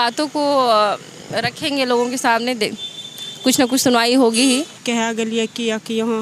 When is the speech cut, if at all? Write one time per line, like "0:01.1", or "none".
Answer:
0:04.8